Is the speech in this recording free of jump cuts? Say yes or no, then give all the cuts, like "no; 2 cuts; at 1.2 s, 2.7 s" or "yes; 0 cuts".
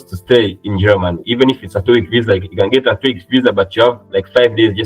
yes; 0 cuts